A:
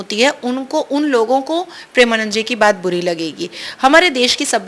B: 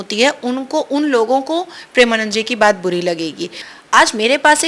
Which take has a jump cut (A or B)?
B